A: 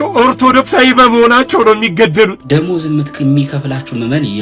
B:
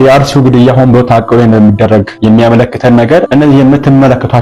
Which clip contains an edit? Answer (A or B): A